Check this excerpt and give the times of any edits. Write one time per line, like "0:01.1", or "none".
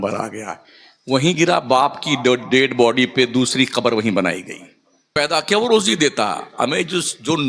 0:05.2

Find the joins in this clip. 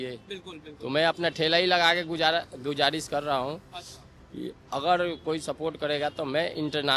none

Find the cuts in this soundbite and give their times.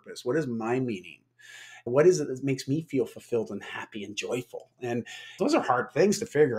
none

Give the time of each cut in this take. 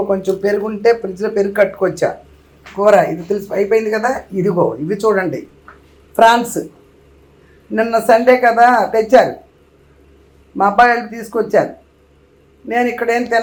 none

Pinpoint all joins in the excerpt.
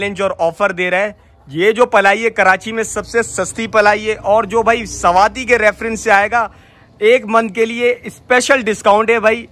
none

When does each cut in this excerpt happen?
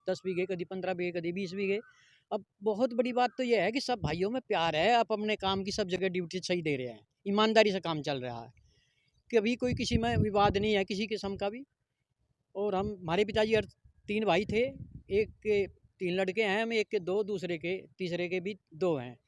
none

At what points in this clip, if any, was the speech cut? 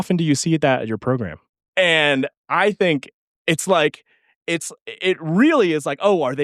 0:01.4

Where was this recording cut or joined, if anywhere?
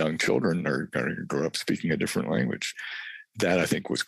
0:02.8

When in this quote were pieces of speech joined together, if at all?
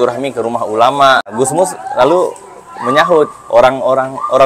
0:01.3

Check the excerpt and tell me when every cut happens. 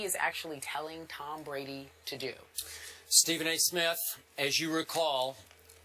0:03.5

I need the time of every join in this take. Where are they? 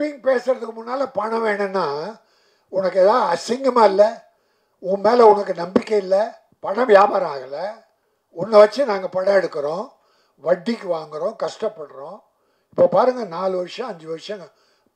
0:06.5

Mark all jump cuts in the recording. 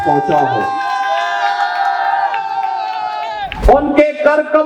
0:03.5

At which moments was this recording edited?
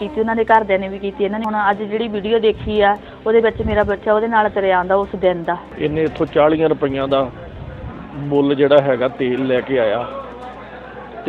0:01.5
0:05.6

